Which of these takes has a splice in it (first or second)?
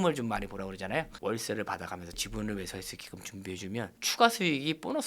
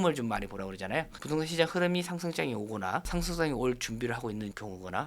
first